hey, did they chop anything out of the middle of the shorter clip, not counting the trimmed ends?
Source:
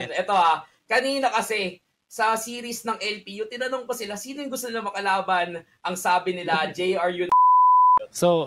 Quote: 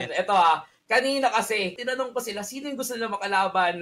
yes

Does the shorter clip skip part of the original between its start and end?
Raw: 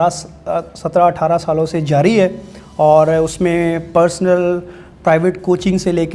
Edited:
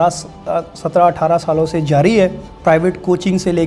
yes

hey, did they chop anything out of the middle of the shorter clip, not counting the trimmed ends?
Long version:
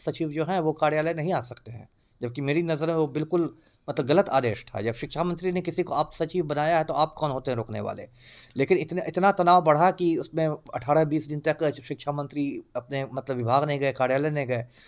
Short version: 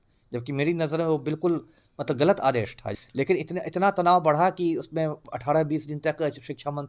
yes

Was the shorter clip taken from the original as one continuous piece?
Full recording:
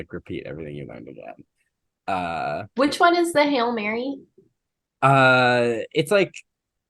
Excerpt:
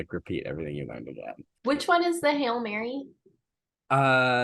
no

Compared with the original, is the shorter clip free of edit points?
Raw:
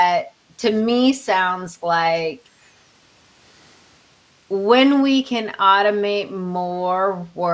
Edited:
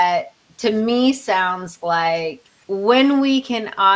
no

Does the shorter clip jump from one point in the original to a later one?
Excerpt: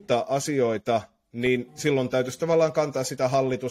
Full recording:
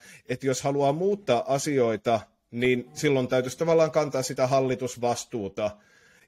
no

